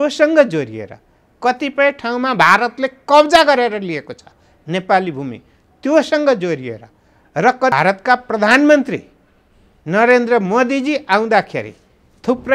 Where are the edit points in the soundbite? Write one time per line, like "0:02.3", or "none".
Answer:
0:07.7